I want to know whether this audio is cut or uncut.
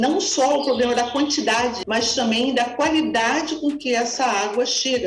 cut